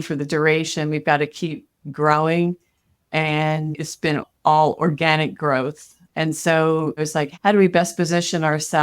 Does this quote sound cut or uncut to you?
cut